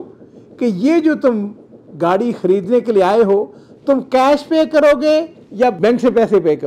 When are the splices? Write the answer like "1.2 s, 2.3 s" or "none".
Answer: 5.8 s